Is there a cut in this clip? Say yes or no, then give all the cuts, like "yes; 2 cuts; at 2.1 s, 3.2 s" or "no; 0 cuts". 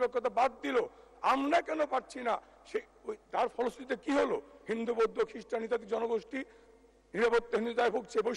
no; 0 cuts